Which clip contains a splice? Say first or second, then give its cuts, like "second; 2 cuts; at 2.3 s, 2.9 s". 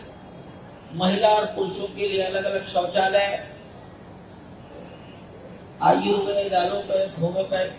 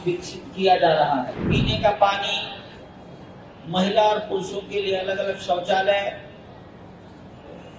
second; 1 cut; at 1.5 s